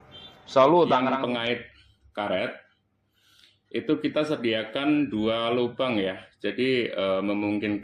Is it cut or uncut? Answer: cut